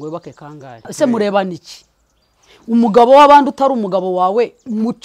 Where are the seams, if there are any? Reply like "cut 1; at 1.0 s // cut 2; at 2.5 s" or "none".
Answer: cut 1; at 0.9 s